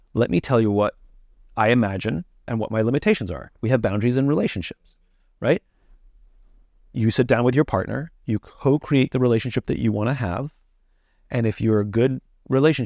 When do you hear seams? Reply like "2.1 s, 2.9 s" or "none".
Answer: none